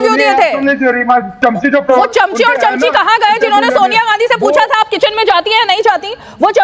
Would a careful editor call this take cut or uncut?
cut